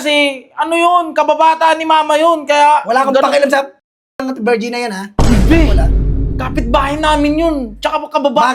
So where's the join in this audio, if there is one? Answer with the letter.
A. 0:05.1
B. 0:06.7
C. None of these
C